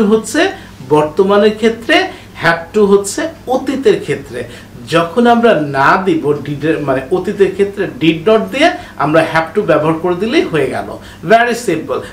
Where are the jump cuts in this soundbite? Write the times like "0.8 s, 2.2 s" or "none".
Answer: none